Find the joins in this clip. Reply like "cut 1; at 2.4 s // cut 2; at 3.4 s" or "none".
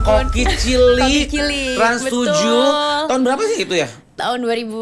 none